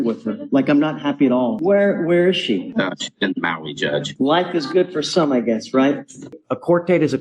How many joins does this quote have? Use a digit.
3